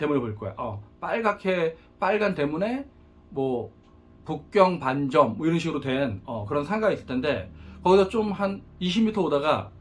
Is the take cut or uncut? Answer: uncut